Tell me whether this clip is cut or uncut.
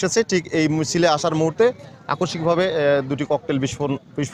uncut